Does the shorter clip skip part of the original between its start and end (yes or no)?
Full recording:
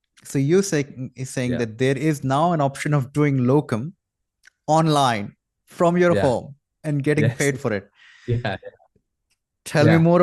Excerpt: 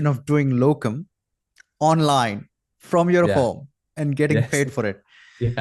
no